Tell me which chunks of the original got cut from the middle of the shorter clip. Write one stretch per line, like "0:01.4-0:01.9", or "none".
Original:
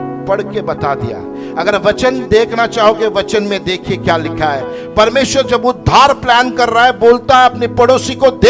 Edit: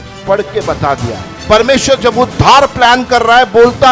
0:01.3-0:04.8